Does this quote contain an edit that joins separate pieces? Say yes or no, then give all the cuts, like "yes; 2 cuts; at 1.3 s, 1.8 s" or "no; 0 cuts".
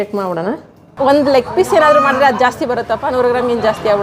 yes; 1 cut; at 1.0 s